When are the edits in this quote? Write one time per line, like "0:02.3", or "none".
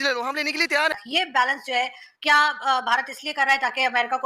0:01.0